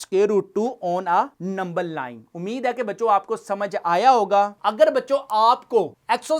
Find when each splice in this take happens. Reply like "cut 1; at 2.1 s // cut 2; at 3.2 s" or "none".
cut 1; at 4.5 s